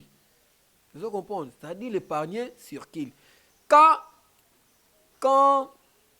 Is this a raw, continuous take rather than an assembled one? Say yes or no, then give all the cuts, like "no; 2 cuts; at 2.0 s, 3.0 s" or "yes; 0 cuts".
yes; 0 cuts